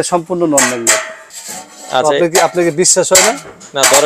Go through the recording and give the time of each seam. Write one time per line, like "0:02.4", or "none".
0:01.2